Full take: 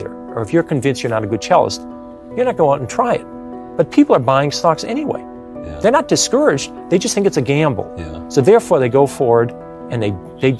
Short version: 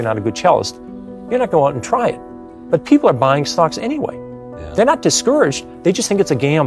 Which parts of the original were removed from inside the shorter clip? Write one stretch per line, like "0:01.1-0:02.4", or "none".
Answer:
none